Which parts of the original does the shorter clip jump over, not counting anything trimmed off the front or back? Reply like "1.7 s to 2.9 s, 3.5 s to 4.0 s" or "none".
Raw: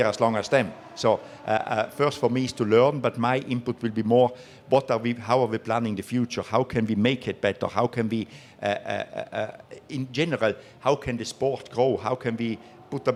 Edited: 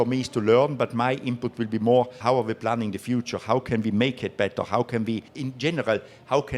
4.4 s to 5.2 s, 8.4 s to 9.9 s

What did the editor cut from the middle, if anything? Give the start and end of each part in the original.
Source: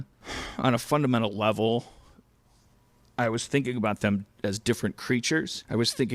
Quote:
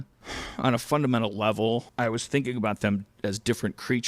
1.9 s to 3.1 s

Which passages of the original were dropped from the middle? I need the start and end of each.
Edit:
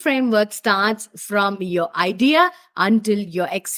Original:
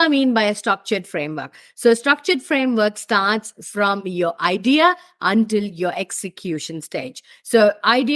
none

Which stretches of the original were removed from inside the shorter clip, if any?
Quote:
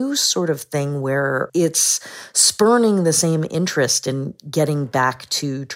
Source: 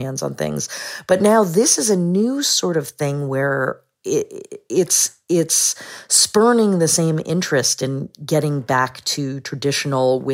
3.7 s to 5.2 s

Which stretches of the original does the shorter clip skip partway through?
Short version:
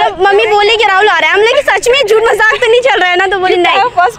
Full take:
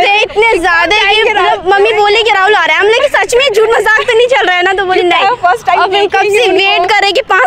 none

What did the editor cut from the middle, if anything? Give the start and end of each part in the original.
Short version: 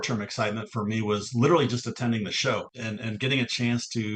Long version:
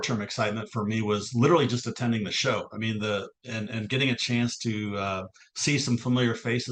2.7 s to 3.4 s

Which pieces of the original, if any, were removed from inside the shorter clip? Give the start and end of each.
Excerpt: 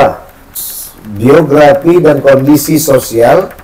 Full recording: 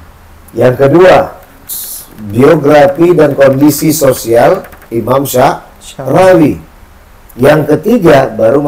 none

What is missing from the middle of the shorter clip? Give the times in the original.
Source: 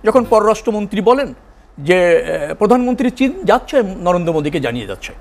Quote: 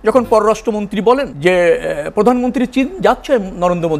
1.3 s to 1.7 s

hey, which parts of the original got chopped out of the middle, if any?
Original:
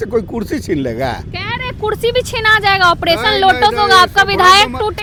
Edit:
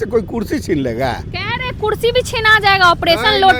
none

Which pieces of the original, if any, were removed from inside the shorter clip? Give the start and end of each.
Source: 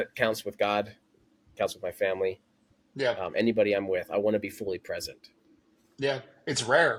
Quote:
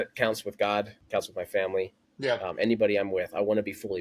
1.0 s to 1.4 s, 2.5 s to 2.8 s

